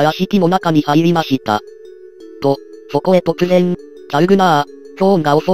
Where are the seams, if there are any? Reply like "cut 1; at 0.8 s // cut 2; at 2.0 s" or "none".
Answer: none